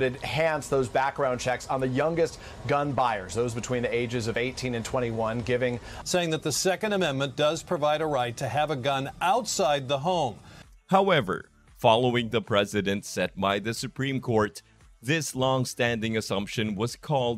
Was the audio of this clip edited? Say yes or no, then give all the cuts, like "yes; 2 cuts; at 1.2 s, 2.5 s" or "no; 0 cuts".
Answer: no; 0 cuts